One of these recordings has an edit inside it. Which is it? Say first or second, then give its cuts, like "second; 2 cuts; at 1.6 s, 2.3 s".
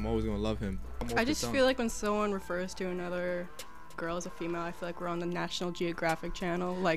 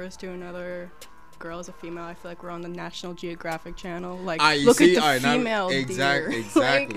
first; 1 cut; at 0.9 s